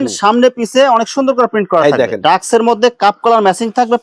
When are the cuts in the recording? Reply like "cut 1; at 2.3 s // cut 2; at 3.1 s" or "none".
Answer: cut 1; at 2.2 s